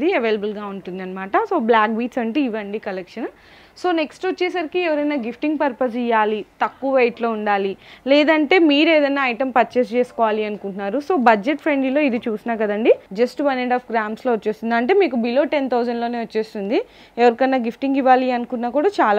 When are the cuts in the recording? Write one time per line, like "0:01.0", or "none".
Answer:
none